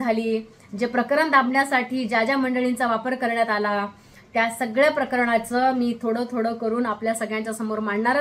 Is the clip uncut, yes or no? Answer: yes